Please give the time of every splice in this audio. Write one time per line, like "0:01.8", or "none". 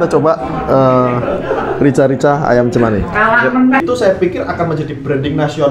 0:03.8